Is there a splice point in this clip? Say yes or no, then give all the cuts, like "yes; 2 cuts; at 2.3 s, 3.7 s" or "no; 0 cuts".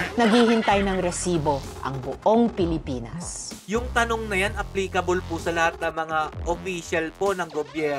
no; 0 cuts